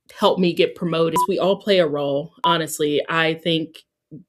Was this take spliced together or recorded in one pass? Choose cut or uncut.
cut